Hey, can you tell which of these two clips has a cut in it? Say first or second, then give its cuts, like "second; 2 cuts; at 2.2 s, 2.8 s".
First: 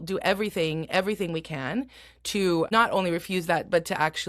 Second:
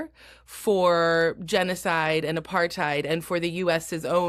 first; 1 cut; at 2.7 s